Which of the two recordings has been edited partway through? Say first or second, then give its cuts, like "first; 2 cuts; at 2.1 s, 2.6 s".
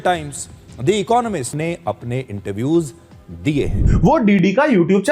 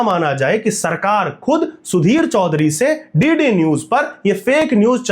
first; 2 cuts; at 1.6 s, 3.8 s